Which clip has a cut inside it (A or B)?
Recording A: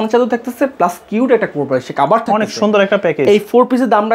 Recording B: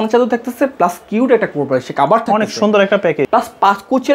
B